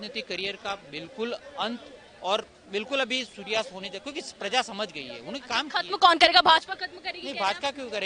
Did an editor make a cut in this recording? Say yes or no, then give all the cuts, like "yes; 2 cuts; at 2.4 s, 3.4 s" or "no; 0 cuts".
no; 0 cuts